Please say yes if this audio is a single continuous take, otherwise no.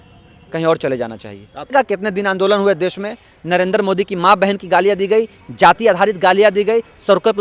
no